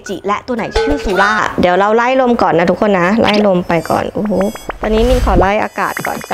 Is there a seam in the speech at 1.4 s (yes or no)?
yes